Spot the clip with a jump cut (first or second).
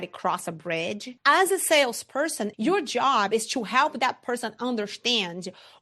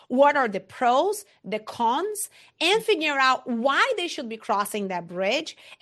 first